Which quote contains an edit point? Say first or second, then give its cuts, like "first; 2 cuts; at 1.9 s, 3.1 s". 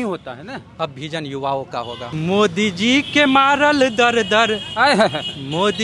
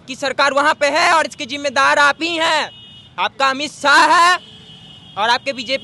first; 1 cut; at 2.0 s